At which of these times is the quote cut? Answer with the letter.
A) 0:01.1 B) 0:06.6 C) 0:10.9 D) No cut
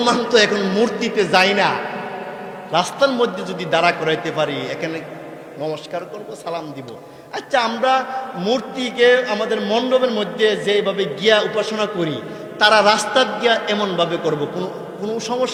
D